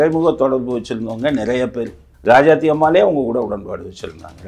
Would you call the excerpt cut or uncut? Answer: cut